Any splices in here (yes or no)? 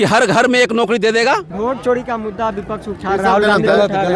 yes